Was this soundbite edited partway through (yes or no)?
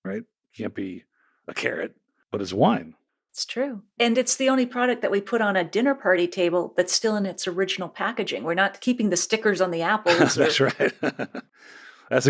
no